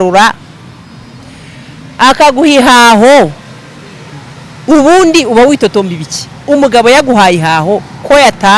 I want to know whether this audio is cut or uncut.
uncut